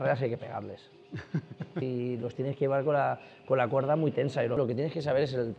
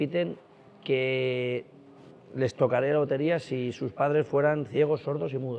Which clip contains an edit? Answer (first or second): first